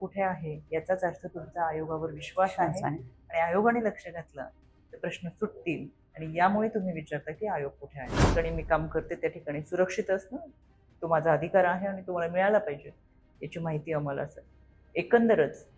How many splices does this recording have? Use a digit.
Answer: 1